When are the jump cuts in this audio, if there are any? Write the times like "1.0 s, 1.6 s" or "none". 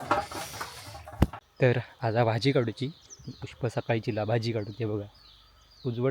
1.4 s